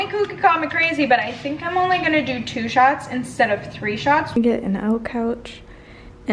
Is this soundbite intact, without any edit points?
no; 1 cut; at 4.4 s

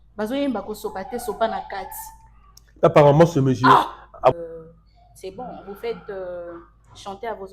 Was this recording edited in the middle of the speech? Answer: yes; 1 cut; at 4.3 s

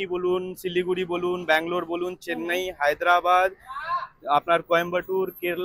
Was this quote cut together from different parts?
no; 0 cuts

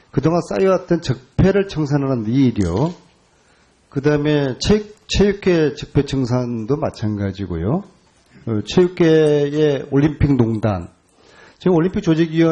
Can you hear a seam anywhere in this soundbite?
yes; 1 cut; at 9.5 s

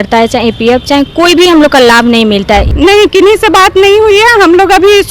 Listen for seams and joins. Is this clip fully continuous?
no; 1 cut; at 2.7 s

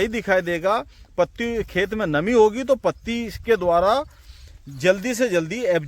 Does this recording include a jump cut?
no; 0 cuts

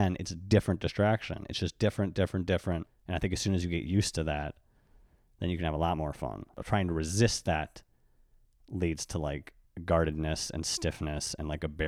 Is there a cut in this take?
yes; 2 cuts; at 2.9 s, 6.6 s

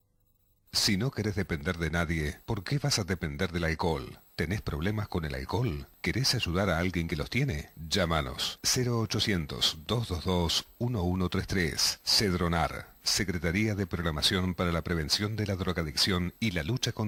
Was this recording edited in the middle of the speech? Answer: no; 0 cuts

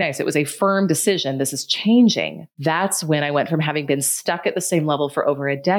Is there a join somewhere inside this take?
yes; 1 cut; at 2.4 s

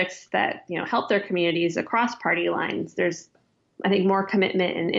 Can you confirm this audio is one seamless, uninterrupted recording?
no; 1 cut; at 3.3 s

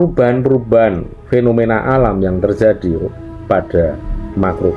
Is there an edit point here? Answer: no; 0 cuts

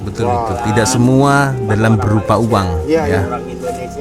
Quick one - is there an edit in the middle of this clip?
no; 0 cuts

